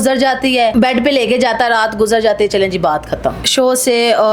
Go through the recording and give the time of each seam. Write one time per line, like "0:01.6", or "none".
0:00.7
0:03.4